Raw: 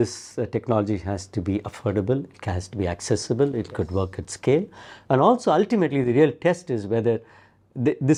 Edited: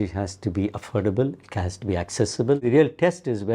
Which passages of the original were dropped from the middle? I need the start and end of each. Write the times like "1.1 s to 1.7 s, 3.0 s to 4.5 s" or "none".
3.5 s to 6.0 s